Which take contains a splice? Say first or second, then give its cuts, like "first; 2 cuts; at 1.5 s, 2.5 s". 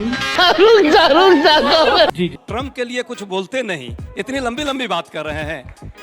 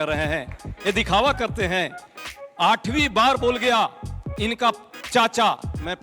first; 1 cut; at 2.4 s